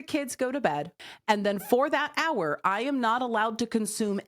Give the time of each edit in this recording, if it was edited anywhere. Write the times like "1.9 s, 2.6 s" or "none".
0.9 s